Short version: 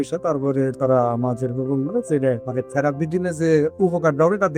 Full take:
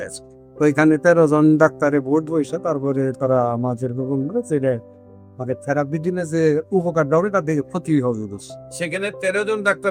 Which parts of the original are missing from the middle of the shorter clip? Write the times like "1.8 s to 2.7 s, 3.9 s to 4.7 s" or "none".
4.9 s to 5.4 s